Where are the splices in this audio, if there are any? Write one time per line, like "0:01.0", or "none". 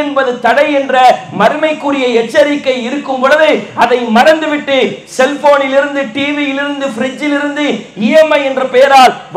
none